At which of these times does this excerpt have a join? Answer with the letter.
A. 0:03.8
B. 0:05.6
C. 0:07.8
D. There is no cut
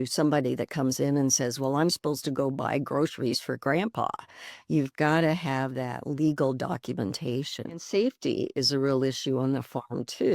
C